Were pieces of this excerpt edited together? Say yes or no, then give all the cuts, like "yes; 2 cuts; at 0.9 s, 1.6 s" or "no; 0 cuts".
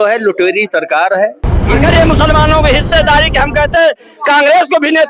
yes; 1 cut; at 1.7 s